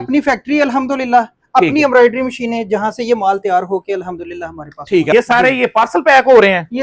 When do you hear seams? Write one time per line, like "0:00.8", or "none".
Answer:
0:05.1